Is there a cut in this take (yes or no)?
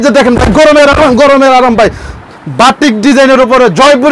no